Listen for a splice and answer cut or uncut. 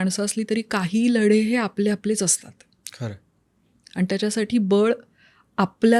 uncut